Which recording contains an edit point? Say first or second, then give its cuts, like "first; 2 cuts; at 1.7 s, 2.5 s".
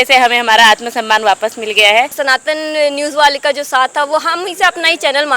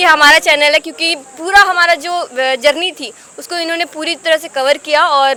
first; 1 cut; at 2.2 s